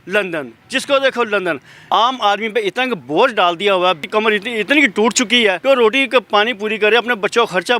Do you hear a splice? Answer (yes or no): yes